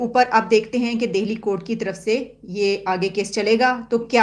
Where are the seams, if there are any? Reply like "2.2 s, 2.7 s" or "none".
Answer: none